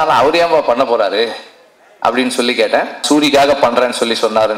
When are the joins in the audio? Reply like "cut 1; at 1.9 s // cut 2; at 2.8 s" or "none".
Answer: cut 1; at 3.0 s